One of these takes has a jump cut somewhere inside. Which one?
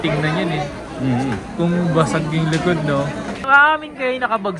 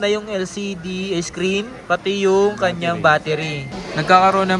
second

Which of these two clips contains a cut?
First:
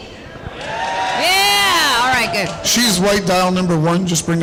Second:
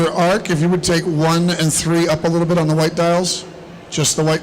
second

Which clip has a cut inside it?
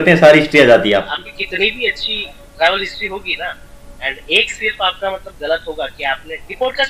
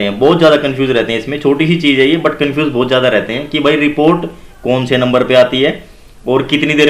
first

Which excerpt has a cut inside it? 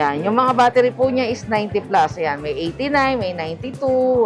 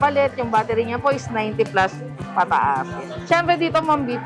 second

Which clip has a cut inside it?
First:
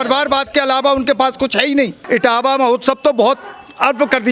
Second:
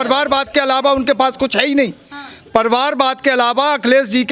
first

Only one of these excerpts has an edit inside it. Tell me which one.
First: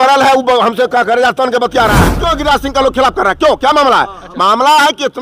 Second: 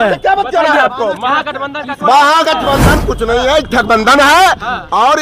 first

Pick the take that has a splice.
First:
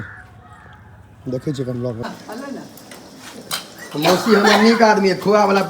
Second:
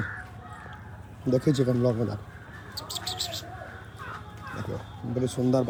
first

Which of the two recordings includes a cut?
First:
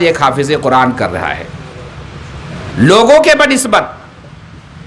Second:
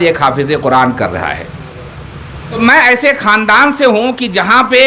second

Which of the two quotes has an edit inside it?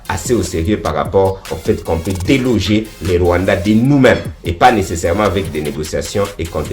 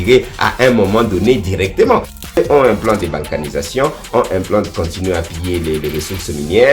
second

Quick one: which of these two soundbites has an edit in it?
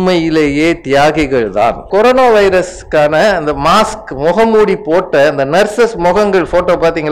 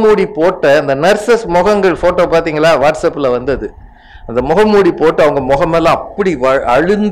first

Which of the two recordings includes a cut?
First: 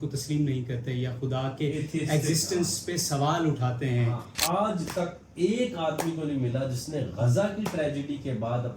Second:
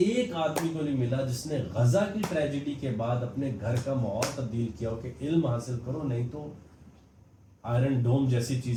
first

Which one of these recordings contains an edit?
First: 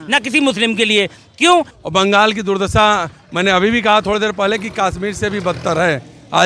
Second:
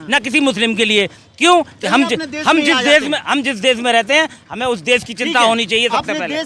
first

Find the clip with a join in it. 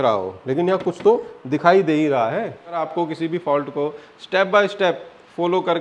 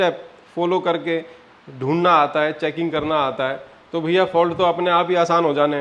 first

